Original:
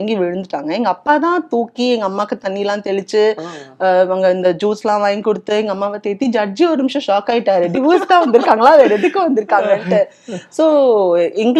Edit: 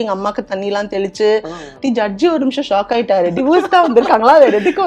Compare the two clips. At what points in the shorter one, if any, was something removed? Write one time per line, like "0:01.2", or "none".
0:01.7